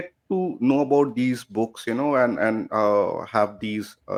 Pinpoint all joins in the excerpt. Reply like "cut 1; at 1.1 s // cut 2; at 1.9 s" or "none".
none